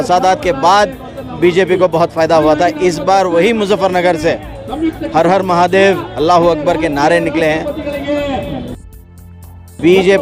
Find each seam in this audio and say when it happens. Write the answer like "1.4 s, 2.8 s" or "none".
none